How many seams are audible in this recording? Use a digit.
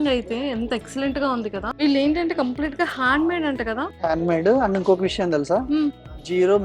2